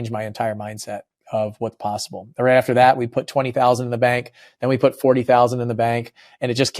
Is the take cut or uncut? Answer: uncut